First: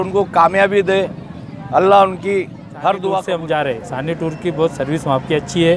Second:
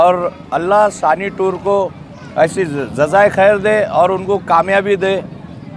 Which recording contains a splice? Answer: first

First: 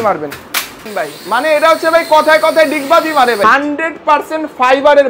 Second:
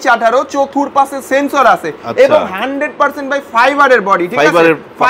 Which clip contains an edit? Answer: first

